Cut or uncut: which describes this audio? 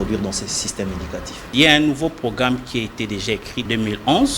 cut